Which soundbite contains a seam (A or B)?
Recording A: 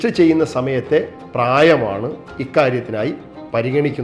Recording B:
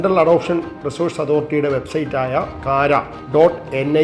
B